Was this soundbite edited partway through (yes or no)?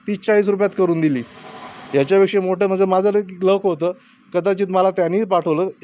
no